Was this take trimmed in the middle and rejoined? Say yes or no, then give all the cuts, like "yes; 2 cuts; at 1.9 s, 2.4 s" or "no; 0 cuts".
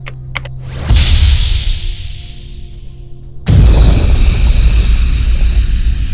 no; 0 cuts